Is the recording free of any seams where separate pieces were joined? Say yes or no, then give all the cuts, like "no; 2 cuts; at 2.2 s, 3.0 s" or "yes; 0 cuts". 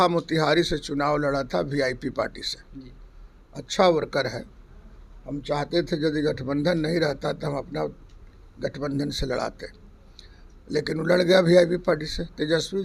yes; 0 cuts